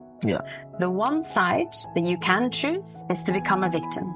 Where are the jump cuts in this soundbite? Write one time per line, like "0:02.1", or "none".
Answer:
none